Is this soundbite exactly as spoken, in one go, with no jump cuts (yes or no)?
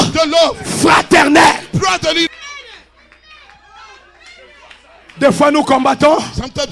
no